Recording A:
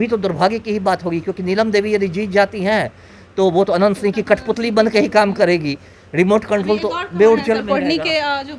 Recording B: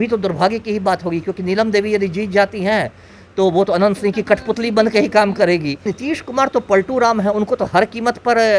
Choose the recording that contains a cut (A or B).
B